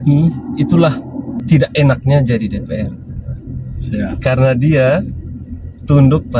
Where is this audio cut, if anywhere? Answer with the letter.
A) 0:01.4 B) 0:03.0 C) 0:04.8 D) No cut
A